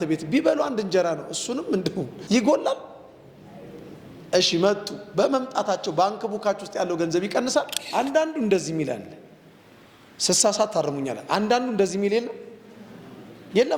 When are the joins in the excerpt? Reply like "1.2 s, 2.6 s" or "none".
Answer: 7.8 s